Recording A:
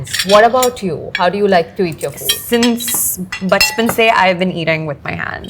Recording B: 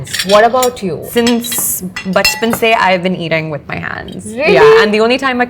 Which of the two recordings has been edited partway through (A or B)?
B